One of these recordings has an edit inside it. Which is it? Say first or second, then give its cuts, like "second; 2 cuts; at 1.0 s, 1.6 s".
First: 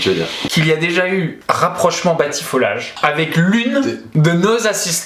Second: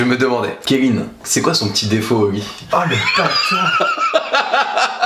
first; 3 cuts; at 1.4 s, 2.9 s, 4.0 s